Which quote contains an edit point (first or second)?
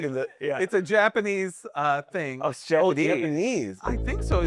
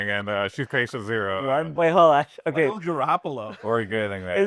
second